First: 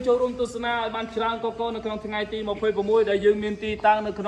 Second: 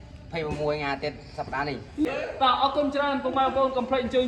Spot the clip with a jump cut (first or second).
second